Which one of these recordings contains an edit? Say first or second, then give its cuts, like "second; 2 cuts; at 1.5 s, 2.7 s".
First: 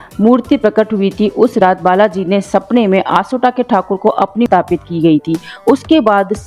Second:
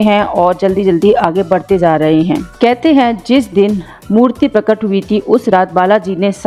first; 1 cut; at 4.5 s